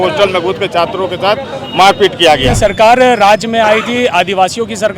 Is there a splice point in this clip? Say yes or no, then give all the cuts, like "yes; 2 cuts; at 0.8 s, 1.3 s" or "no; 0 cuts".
yes; 1 cut; at 2.5 s